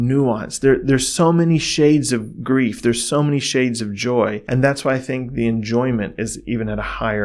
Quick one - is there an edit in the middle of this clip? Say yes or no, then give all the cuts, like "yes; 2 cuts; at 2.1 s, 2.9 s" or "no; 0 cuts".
yes; 1 cut; at 4.4 s